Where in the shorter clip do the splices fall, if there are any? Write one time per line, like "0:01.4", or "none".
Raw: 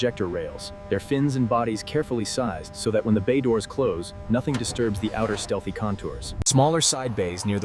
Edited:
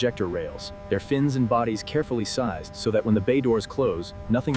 none